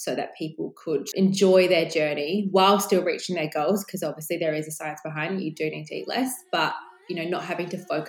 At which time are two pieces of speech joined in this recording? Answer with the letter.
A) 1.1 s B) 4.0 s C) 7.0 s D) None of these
A